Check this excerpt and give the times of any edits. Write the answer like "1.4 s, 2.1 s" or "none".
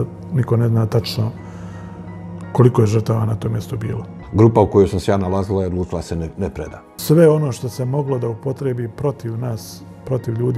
4.2 s, 6.9 s